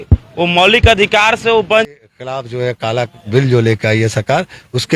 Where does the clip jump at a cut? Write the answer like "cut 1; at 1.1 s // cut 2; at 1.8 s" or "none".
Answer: cut 1; at 2.0 s